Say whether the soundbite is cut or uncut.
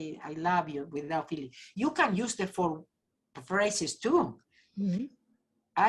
uncut